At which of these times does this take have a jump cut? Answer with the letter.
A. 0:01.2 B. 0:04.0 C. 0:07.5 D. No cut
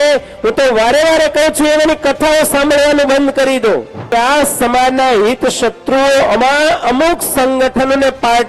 B